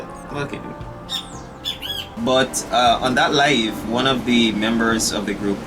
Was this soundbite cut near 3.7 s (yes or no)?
no